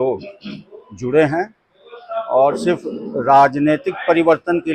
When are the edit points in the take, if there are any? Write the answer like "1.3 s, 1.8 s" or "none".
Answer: none